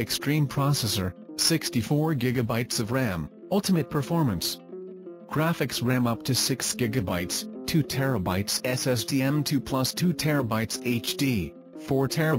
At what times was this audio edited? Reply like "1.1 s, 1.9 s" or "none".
none